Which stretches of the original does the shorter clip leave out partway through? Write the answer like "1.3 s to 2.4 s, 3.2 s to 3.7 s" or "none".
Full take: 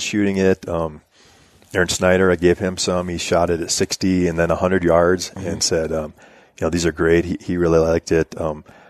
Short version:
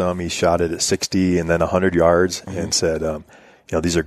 none